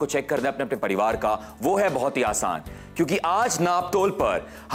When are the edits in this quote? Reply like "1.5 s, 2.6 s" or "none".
none